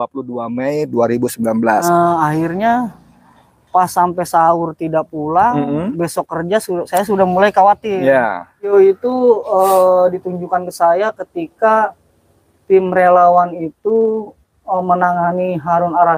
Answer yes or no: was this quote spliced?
yes